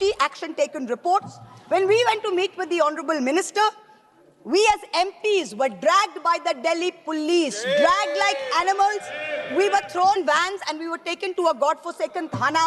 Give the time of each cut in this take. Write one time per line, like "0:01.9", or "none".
none